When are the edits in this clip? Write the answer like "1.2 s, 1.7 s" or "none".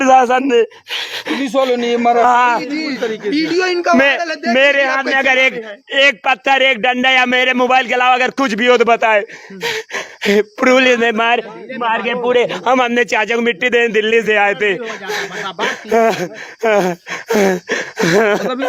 none